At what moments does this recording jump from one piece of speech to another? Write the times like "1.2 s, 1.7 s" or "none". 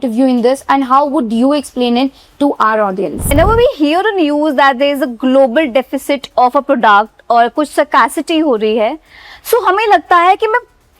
3.3 s